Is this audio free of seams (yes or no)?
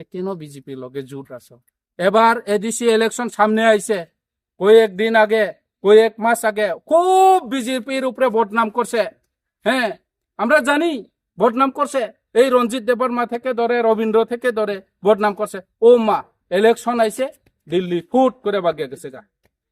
yes